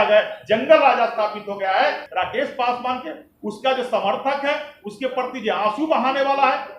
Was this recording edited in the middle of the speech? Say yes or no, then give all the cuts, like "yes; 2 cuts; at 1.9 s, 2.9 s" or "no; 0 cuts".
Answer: yes; 1 cut; at 2.0 s